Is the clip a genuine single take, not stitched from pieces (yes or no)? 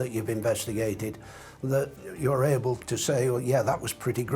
no